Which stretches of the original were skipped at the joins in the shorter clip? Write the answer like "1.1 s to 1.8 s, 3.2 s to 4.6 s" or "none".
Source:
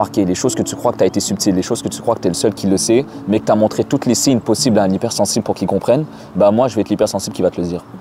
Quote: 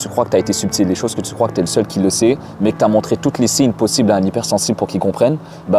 none